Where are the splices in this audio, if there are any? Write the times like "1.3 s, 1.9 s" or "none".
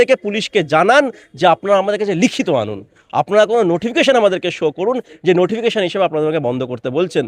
none